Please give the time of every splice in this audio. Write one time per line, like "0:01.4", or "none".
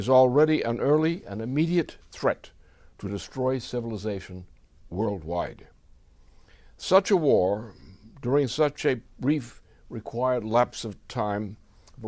none